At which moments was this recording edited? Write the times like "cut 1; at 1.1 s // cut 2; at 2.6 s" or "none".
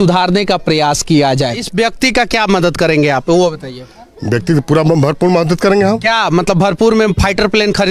cut 1; at 1.7 s